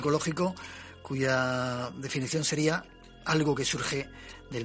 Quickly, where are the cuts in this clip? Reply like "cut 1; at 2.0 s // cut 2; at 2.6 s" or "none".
none

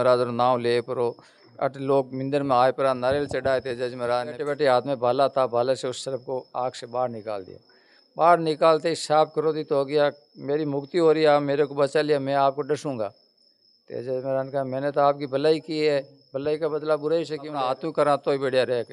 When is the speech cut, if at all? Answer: cut 1; at 4.4 s // cut 2; at 17.7 s

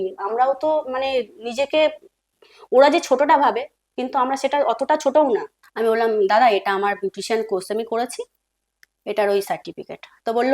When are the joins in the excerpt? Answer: cut 1; at 5.6 s

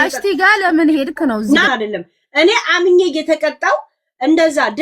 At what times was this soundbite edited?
cut 1; at 1.7 s

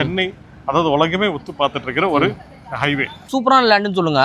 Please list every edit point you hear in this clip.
cut 1; at 3.3 s

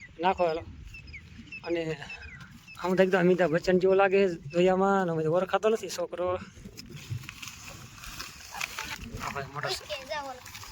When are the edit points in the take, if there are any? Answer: cut 1; at 8.9 s

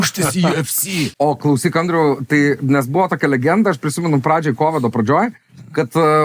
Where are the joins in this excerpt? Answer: cut 1; at 1.1 s

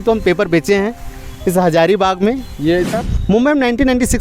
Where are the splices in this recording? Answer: cut 1; at 3.0 s

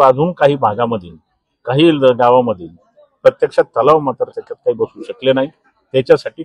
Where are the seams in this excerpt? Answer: none

